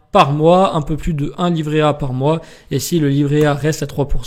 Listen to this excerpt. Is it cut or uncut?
uncut